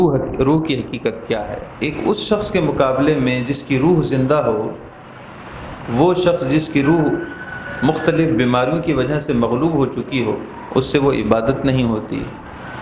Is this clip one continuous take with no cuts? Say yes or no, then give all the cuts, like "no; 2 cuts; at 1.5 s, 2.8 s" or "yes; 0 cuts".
no; 1 cut; at 1.6 s